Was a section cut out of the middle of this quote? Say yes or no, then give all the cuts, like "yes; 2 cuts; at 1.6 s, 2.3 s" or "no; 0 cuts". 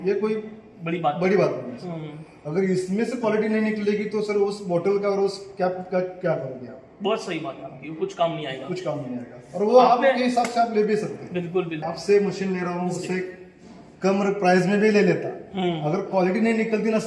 yes; 1 cut; at 11.8 s